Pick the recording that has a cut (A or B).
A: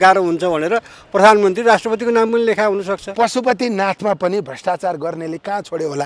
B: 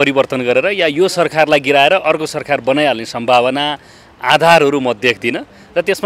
A